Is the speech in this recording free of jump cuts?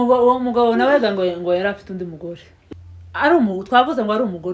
no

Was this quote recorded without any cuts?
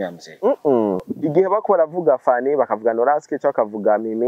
no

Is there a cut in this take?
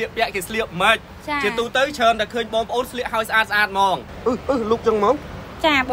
yes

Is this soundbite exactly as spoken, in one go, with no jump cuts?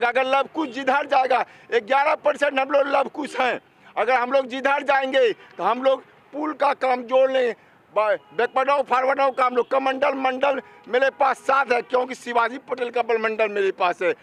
yes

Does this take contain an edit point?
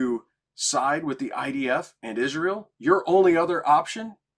yes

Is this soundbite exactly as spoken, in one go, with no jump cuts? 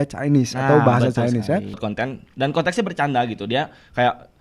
no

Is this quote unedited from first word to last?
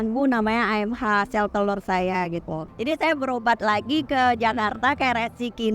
no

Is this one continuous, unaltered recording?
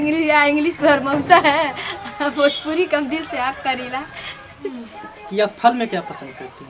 no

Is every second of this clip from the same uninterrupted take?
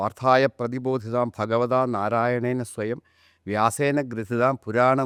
yes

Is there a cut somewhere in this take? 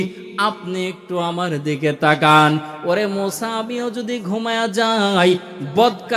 no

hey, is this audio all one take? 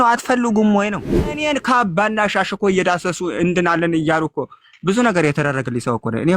no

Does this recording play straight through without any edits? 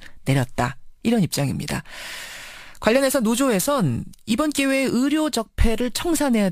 yes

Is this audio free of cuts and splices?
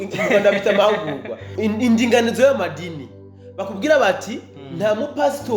no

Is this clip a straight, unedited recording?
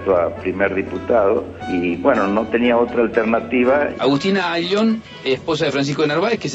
no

